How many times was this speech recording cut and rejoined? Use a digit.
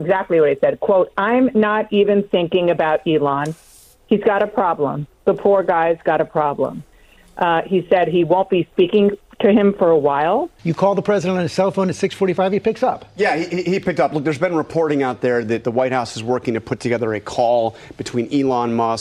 1